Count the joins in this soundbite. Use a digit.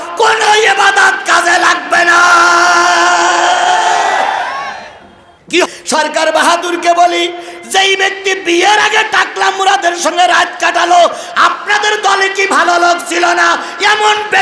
1